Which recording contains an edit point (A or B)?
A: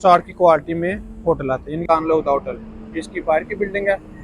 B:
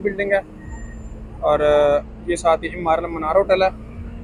A